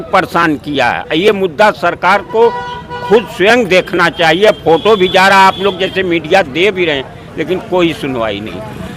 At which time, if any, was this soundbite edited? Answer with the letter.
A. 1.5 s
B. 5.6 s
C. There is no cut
C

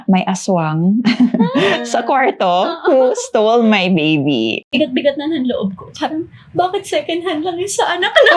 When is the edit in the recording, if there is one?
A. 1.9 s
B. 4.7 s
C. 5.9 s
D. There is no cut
B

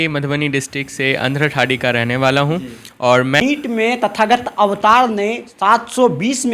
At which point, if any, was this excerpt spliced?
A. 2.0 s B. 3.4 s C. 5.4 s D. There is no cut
B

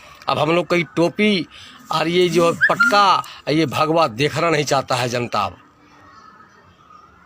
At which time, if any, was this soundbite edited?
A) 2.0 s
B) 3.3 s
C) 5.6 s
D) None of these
D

